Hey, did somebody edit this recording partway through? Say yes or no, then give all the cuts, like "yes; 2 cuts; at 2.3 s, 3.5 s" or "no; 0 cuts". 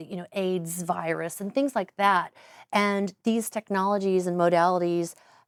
no; 0 cuts